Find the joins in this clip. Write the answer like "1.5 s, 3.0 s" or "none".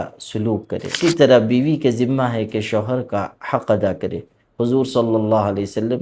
1.0 s